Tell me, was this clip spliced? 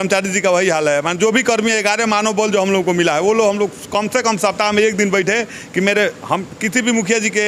no; 0 cuts

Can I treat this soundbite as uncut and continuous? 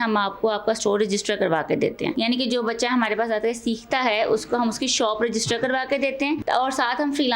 no; 2 cuts; at 2.1 s, 6.4 s

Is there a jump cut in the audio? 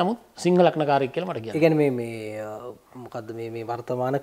no; 0 cuts

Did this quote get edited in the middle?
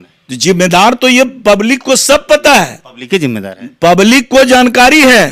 no; 0 cuts

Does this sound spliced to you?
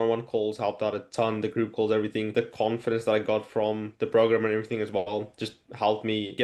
yes; 1 cut; at 2.3 s

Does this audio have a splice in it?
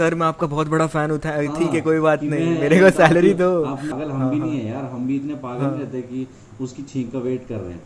yes; 1 cut; at 3.9 s

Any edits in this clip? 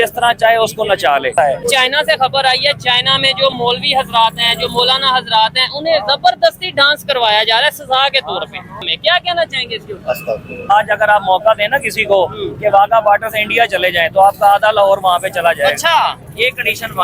yes; 3 cuts; at 1.6 s, 8.8 s, 10.7 s

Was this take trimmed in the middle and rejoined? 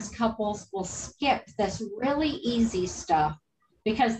no; 0 cuts

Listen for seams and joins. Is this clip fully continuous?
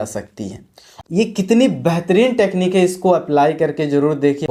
yes; 0 cuts

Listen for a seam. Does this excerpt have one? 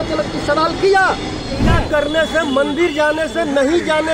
yes; 1 cut; at 1.6 s

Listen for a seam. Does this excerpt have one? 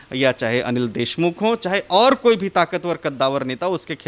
no; 0 cuts

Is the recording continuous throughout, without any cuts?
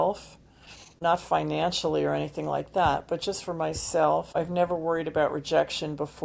yes; 0 cuts

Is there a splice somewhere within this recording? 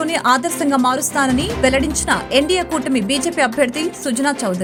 no; 0 cuts

